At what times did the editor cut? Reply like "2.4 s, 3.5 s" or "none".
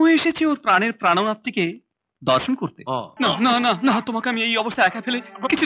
3.1 s